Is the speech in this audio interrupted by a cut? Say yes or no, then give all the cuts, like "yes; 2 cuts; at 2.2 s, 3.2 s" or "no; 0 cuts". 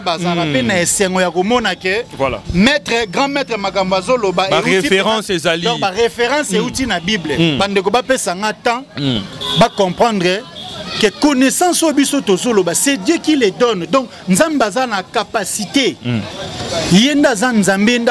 no; 0 cuts